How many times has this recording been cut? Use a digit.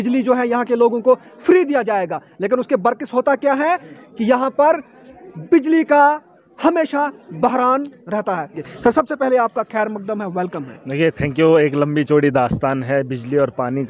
0